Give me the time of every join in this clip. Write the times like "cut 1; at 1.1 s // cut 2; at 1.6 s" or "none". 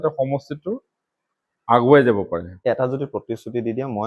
cut 1; at 2.4 s